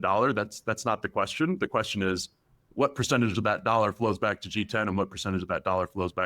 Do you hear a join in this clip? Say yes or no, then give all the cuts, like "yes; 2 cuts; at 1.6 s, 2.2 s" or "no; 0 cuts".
no; 0 cuts